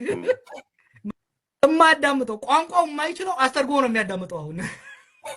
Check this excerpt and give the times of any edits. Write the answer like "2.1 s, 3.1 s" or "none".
1.1 s